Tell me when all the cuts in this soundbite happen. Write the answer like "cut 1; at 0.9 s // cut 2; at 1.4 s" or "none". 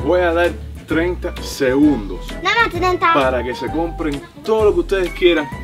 none